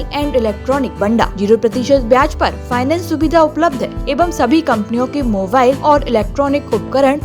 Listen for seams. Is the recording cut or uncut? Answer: cut